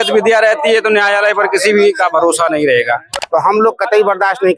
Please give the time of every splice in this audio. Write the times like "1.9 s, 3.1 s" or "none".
3.1 s